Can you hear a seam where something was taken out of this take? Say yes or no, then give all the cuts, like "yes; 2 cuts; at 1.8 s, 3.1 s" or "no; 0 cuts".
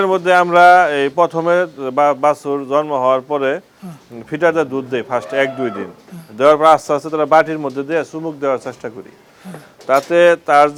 no; 0 cuts